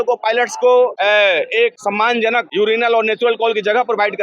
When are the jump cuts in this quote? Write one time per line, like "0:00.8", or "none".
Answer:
0:01.0
0:02.2